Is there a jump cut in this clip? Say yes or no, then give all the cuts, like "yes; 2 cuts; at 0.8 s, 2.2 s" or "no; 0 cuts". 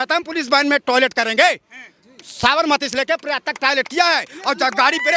no; 0 cuts